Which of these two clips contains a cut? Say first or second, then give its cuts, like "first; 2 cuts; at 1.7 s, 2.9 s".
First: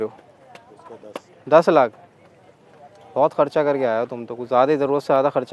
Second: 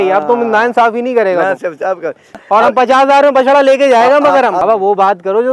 second; 2 cuts; at 2.3 s, 4.6 s